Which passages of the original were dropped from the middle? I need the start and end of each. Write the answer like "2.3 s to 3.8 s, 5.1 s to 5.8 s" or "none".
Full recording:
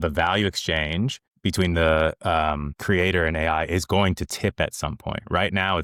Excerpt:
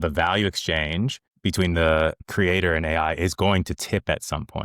2.2 s to 2.7 s